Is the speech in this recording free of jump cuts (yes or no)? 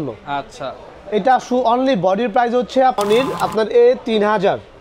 no